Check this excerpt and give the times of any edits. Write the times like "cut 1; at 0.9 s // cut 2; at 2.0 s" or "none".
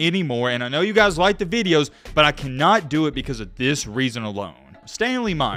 none